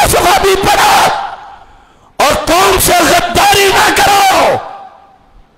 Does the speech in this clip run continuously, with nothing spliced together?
yes; 0 cuts

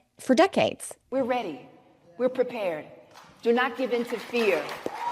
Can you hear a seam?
yes; 1 cut; at 1.1 s

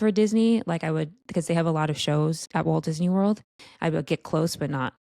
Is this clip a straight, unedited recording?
no; 2 cuts; at 2.4 s, 3.6 s

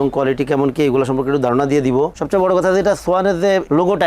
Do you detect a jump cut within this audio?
yes; 1 cut; at 2.2 s

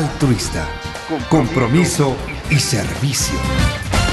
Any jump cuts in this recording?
no; 0 cuts

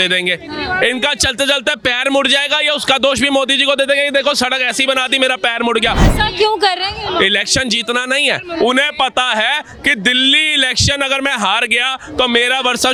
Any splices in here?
no; 0 cuts

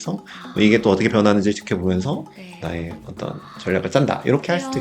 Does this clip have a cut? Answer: no; 0 cuts

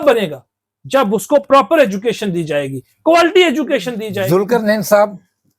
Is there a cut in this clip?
yes; 1 cut; at 4.0 s

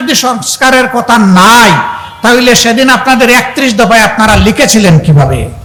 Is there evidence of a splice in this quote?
no; 0 cuts

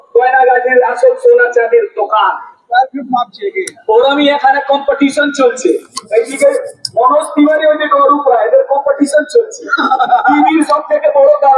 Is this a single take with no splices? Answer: yes; 0 cuts

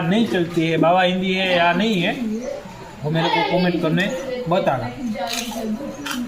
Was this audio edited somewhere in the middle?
no; 0 cuts

